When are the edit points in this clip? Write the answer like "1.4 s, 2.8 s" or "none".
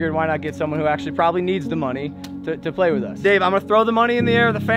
3.2 s